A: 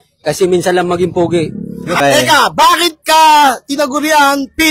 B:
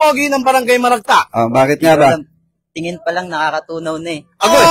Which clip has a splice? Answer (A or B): A